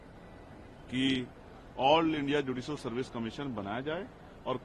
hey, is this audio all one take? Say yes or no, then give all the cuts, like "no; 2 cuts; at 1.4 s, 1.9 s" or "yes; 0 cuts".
yes; 0 cuts